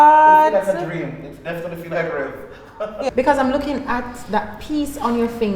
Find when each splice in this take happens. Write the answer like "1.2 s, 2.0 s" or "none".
3.1 s